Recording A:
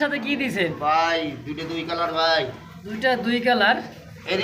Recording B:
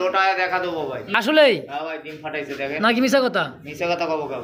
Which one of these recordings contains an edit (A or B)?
B